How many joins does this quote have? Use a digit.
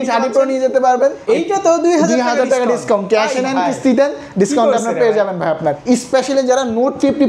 2